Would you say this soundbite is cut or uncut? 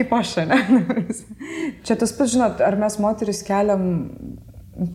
cut